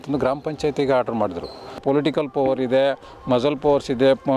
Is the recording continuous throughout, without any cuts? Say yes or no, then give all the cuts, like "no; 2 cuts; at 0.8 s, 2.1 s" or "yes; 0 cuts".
no; 1 cut; at 1.8 s